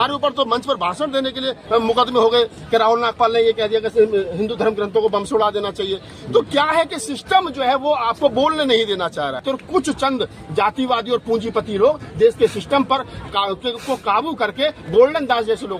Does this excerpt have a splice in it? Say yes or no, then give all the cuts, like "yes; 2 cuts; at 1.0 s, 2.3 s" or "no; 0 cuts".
yes; 1 cut; at 9.4 s